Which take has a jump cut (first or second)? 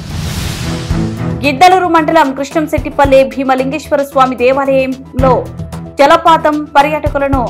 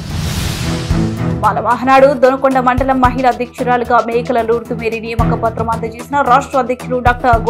first